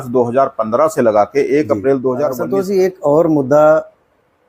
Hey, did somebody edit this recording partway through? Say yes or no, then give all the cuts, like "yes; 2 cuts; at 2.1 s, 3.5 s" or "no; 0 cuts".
yes; 1 cut; at 2.4 s